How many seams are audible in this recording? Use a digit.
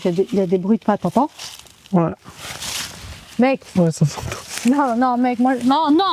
0